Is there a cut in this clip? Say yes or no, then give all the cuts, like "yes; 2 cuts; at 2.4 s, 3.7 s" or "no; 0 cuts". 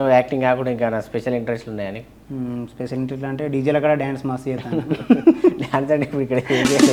no; 0 cuts